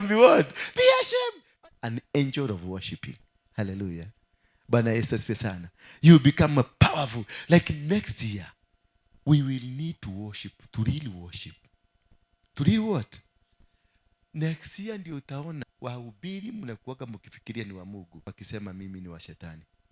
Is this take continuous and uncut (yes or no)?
no